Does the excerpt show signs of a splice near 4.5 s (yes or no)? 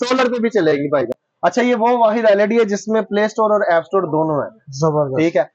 no